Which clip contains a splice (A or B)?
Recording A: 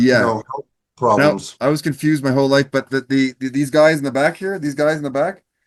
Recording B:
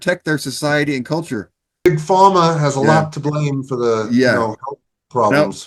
B